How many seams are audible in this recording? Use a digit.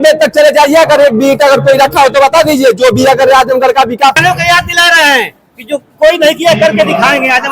1